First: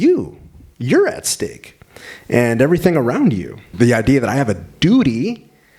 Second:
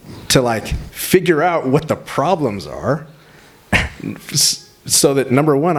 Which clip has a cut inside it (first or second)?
first